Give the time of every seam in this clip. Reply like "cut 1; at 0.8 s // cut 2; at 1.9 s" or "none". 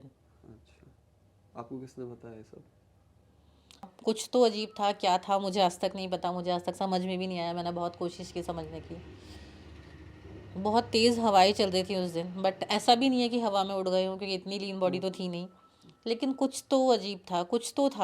cut 1; at 3.9 s